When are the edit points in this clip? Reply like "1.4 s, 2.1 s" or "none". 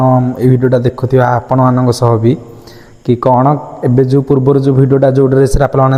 none